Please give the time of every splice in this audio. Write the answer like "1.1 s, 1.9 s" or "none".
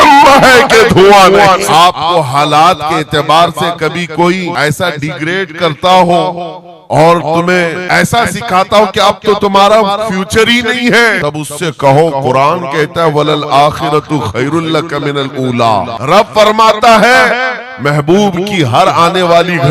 1.6 s, 4.5 s, 7.8 s, 11.2 s, 15.9 s